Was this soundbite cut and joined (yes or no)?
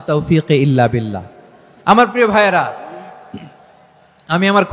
no